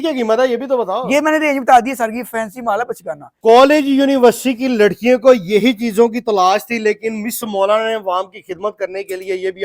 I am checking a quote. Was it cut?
yes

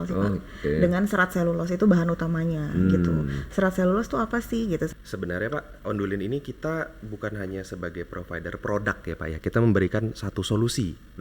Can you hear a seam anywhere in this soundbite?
yes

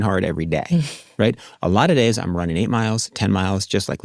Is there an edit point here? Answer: no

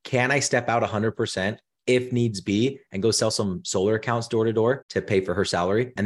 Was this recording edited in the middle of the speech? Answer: no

